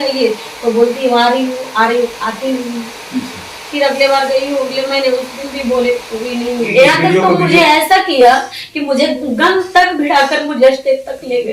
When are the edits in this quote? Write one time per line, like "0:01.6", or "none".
0:06.7